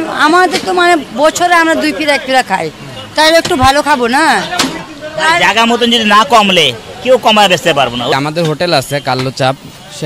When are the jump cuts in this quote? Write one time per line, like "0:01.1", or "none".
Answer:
0:04.8
0:08.1